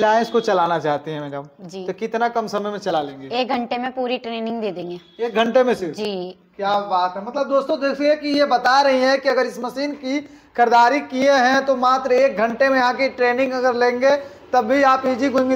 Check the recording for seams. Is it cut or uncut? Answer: uncut